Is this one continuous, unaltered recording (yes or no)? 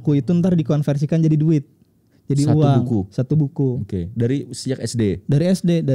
yes